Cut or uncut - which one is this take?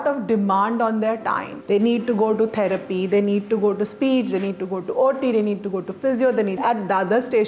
cut